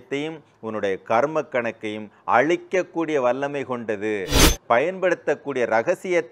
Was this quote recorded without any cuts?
no; 1 cut; at 4.4 s

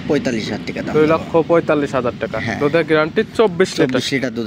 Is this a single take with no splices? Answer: yes; 0 cuts

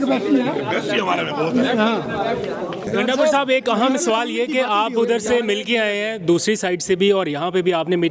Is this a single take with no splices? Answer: yes; 0 cuts

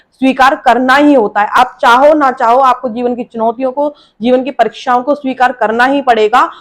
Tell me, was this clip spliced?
no; 0 cuts

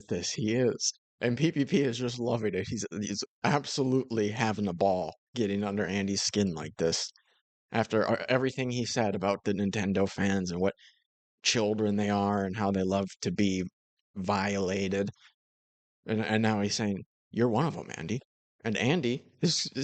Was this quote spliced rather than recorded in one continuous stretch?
no; 0 cuts

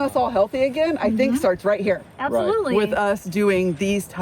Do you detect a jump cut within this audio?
no; 0 cuts

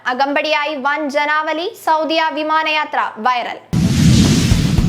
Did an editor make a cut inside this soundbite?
yes; 1 cut; at 3.6 s

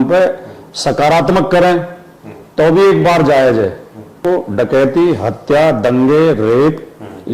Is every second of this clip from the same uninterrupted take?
no; 1 cut; at 4.2 s

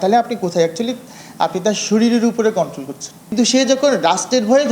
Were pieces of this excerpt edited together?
yes; 1 cut; at 3.3 s

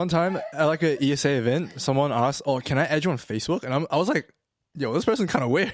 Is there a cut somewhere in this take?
no; 0 cuts

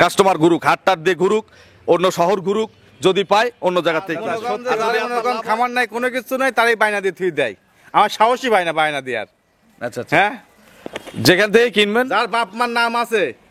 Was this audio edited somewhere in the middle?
yes; 1 cut; at 5.0 s

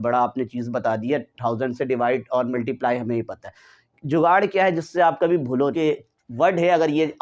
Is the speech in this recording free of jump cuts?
no; 1 cut; at 5.8 s

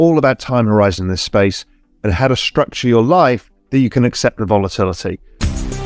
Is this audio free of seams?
yes; 0 cuts

